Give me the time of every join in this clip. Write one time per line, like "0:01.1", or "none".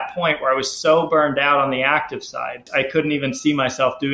0:02.7